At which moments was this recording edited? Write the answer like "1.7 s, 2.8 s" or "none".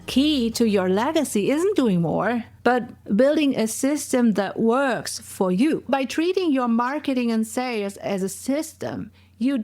3.0 s, 5.9 s